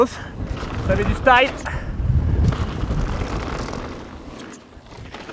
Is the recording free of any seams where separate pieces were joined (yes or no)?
yes